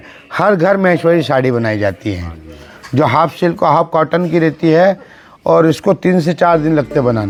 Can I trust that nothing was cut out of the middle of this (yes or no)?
yes